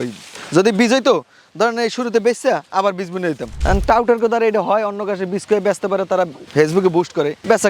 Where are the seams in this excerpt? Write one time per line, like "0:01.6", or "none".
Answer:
0:03.5